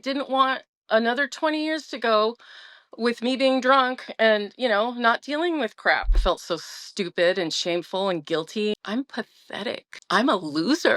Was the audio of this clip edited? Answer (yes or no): yes